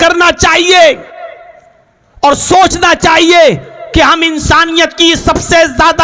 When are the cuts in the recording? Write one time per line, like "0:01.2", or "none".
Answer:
none